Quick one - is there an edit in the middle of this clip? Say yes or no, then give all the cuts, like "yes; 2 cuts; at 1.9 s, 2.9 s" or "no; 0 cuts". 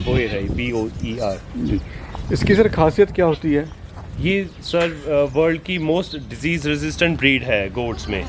no; 0 cuts